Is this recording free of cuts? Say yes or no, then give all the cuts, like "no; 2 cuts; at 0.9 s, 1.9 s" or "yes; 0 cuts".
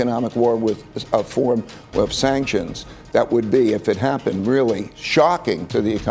no; 1 cut; at 5.2 s